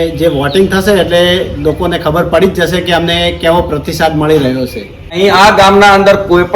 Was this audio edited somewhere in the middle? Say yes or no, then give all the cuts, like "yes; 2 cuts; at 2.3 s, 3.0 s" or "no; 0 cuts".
yes; 1 cut; at 5.2 s